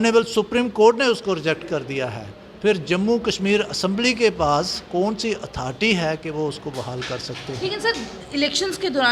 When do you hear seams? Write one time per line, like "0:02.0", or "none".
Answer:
none